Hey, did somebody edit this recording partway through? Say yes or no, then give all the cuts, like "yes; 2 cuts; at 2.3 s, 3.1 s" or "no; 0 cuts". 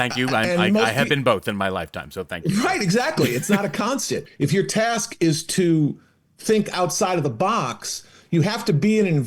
yes; 1 cut; at 4.3 s